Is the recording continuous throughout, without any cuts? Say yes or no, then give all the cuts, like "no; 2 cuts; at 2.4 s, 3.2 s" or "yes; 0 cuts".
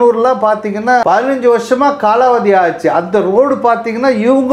no; 1 cut; at 1.0 s